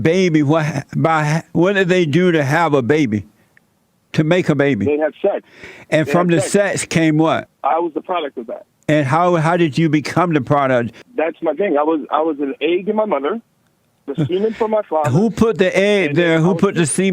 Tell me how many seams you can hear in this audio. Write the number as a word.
two